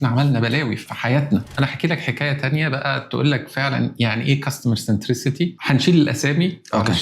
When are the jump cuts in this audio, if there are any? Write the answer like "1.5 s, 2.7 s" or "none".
1.2 s, 5.6 s